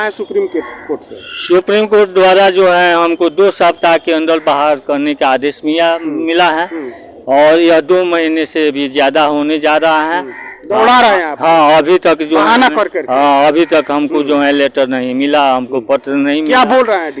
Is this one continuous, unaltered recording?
yes; 0 cuts

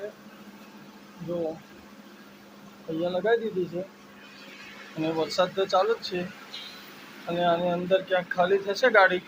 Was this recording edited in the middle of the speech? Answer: no; 0 cuts

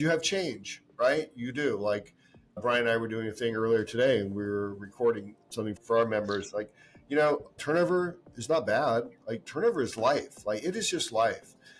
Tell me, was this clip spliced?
yes; 1 cut; at 5.7 s

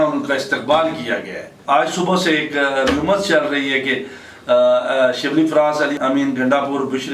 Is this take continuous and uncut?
no; 2 cuts; at 1.5 s, 6.0 s

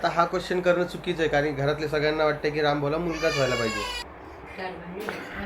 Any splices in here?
yes; 1 cut; at 4.0 s

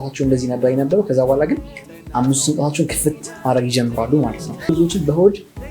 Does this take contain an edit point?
yes; 1 cut; at 4.7 s

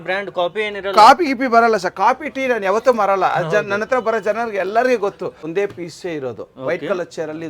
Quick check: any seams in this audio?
yes; 1 cut; at 5.4 s

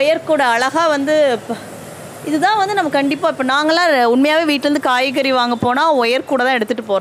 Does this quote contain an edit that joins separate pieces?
no; 0 cuts

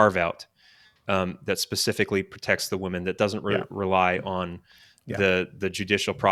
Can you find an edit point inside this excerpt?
no; 0 cuts

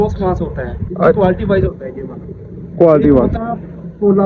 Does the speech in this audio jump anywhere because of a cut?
no; 0 cuts

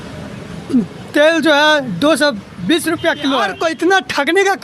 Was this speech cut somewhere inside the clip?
yes; 1 cut; at 3.6 s

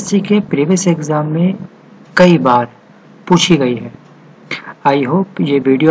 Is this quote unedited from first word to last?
yes; 0 cuts

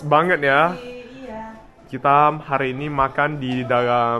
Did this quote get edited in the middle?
no; 0 cuts

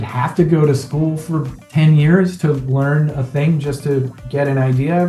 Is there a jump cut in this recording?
no; 0 cuts

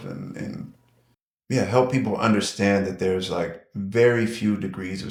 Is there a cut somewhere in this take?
no; 0 cuts

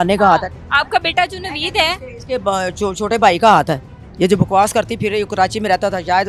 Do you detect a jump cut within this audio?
no; 0 cuts

